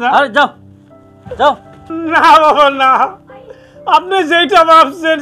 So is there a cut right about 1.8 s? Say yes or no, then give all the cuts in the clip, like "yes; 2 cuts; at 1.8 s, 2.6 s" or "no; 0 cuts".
yes; 1 cut; at 1.8 s